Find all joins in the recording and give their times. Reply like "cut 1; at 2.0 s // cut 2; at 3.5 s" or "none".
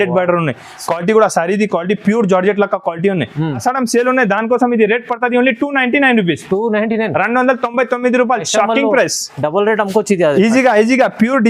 cut 1; at 3.6 s